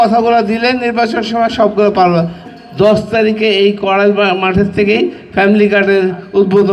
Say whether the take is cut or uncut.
cut